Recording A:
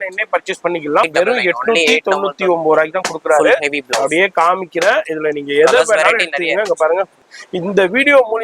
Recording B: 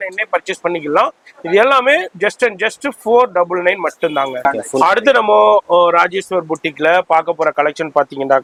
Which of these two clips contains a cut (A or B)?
A